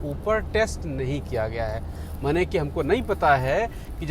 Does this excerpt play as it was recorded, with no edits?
yes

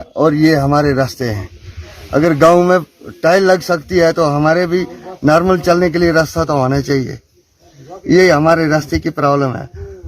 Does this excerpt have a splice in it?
no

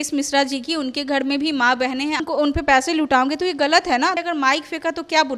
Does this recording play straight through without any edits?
no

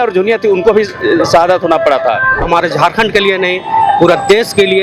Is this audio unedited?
no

